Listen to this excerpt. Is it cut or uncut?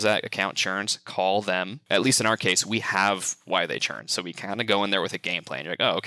cut